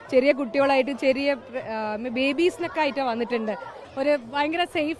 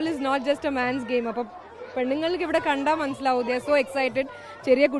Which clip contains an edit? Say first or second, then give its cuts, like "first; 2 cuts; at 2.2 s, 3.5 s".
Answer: first; 1 cut; at 3.8 s